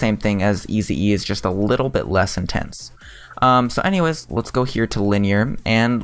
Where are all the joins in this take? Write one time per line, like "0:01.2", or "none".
0:02.4